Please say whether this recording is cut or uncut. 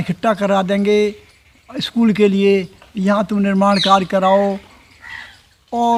uncut